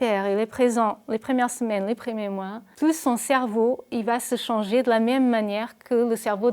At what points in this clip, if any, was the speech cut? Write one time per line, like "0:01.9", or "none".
0:02.6